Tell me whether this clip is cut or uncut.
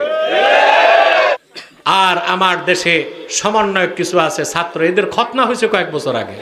cut